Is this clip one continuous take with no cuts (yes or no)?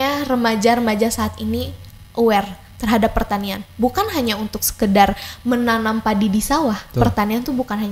yes